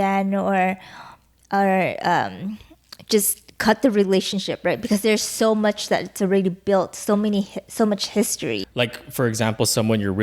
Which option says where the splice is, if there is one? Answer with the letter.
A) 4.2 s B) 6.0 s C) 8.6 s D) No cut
C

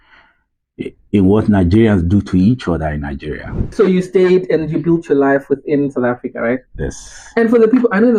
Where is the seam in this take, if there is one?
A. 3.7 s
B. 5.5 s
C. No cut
A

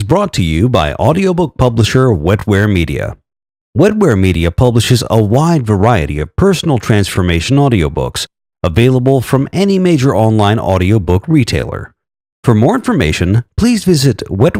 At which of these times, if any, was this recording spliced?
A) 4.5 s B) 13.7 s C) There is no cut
C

